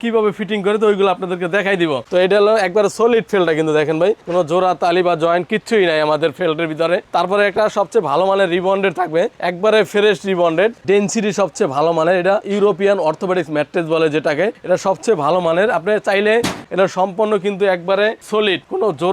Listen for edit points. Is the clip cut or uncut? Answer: cut